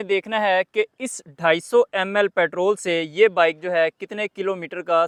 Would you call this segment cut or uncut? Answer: uncut